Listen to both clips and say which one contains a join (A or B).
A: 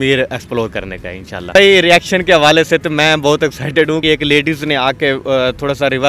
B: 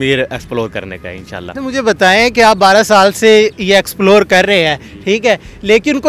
A